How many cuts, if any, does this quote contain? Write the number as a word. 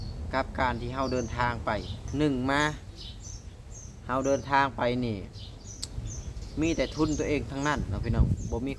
one